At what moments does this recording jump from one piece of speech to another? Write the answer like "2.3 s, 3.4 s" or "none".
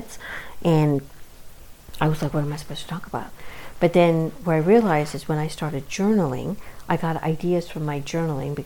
none